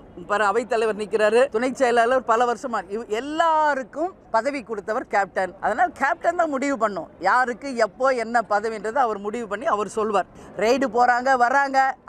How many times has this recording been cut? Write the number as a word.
four